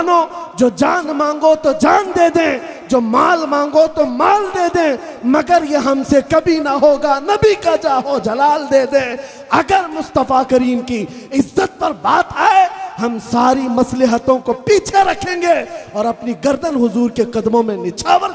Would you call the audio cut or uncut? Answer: uncut